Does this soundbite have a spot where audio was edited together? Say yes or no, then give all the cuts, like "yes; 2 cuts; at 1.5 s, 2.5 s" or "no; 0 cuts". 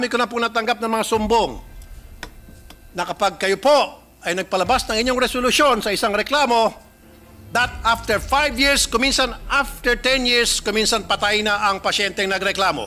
no; 0 cuts